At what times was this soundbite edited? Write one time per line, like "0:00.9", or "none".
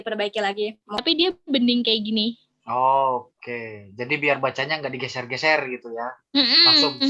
0:01.0